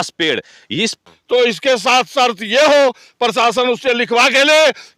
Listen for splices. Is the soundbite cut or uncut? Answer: cut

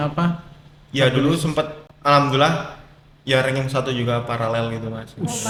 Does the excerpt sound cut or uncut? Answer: uncut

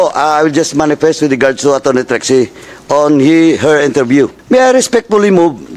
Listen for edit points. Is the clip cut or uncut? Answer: cut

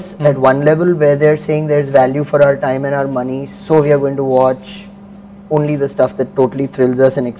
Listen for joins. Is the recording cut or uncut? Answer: uncut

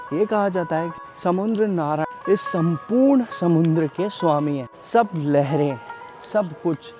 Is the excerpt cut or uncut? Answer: cut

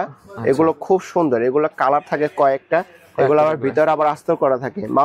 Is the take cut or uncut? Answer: uncut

